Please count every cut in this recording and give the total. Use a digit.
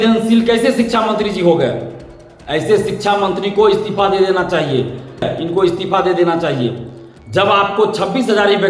1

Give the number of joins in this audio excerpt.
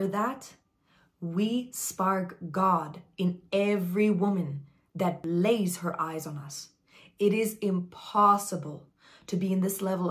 1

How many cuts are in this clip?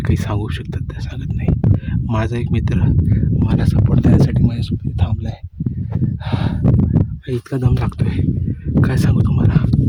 0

